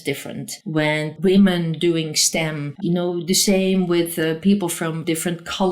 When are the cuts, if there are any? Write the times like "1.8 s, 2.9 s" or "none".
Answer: 1.0 s, 2.7 s